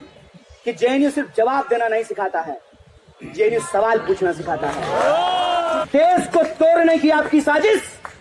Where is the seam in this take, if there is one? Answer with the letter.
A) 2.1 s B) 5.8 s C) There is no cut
B